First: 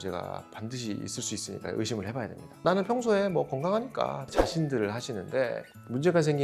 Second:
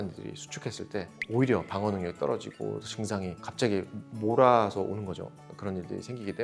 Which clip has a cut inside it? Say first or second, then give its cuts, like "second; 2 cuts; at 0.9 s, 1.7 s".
first; 2 cuts; at 2.5 s, 4.2 s